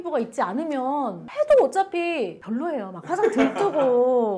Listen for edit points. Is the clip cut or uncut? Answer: cut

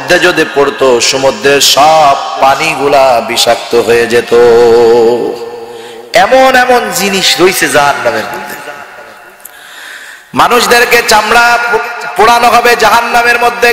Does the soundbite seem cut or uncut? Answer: uncut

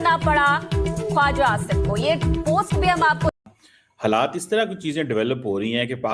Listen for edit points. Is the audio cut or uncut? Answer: cut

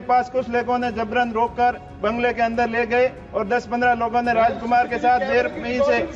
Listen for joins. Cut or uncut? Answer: uncut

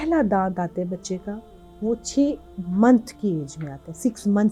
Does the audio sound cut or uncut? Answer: uncut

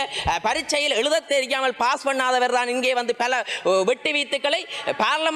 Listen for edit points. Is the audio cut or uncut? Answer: uncut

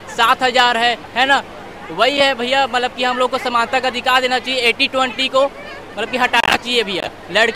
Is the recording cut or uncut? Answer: uncut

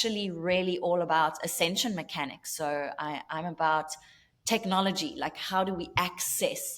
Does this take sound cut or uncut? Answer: uncut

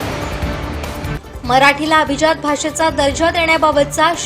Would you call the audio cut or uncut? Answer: cut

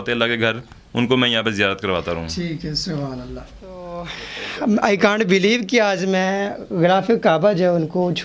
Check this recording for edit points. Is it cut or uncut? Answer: cut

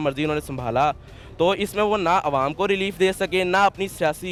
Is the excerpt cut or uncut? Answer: uncut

